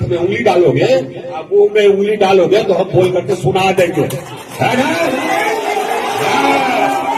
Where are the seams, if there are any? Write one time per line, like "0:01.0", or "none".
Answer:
none